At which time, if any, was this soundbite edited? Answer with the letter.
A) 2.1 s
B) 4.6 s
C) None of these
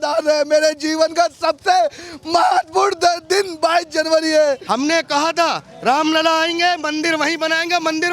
B